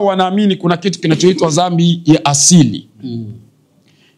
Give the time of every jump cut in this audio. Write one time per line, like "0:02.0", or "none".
none